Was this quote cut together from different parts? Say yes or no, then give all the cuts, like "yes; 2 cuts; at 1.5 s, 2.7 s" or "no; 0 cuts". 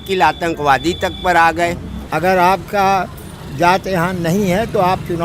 yes; 1 cut; at 1.9 s